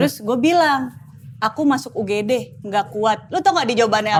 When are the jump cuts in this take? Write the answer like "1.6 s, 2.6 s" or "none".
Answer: none